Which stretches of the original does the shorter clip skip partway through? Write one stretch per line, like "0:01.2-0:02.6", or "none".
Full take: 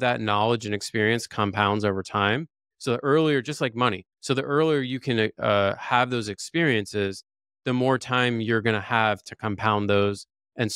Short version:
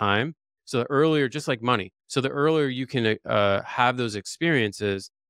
none